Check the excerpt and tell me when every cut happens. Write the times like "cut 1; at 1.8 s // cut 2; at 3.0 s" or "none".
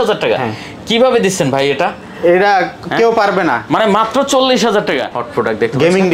cut 1; at 5.2 s